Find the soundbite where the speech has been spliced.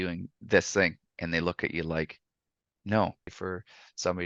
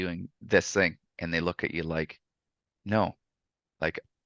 first; 1 cut; at 3.3 s

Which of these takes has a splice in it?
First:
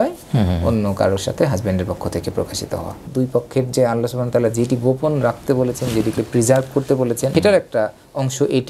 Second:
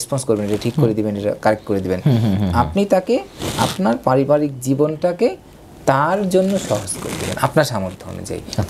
first; 2 cuts; at 3.1 s, 7.3 s

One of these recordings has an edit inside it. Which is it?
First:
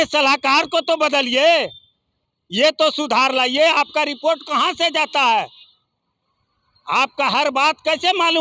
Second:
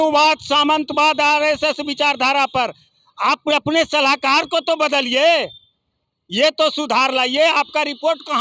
second; 1 cut; at 2.9 s

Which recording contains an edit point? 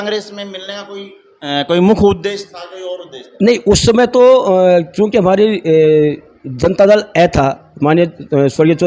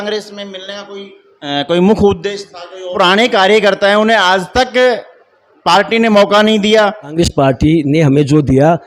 second; 2 cuts; at 2.9 s, 7.1 s

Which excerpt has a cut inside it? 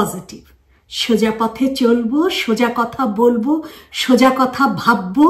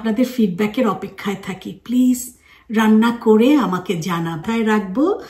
second; 1 cut; at 4.4 s

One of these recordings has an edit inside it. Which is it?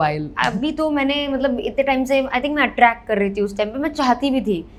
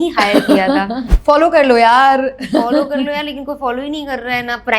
second; 1 cut; at 1.1 s

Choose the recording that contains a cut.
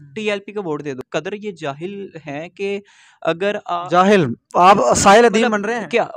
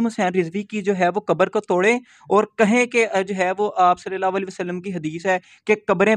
first; 1 cut; at 1.0 s

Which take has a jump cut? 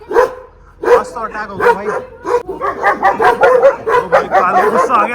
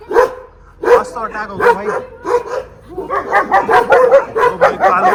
first; 1 cut; at 2.5 s

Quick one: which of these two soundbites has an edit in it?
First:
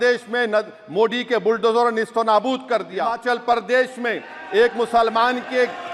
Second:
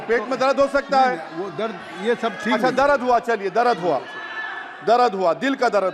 first; 1 cut; at 3.2 s

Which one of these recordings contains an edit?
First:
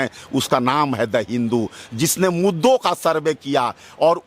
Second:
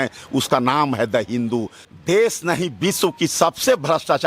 second; 1 cut; at 1.8 s

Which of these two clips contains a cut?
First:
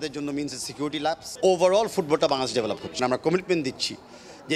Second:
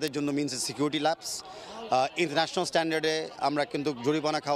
first; 1 cut; at 1.3 s

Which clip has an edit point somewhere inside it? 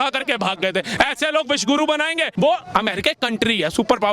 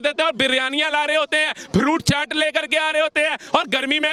first; 1 cut; at 2.3 s

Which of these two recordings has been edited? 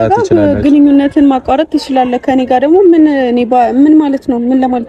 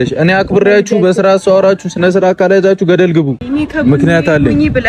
second; 1 cut; at 3.5 s

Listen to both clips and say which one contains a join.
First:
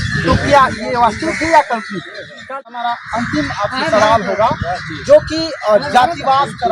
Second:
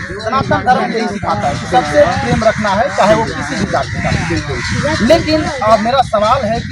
first; 1 cut; at 2.6 s

